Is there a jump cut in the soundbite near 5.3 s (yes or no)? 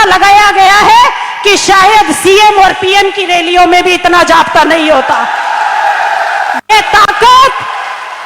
no